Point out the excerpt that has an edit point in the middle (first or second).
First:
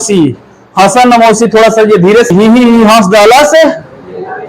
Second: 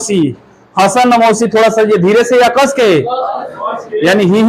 first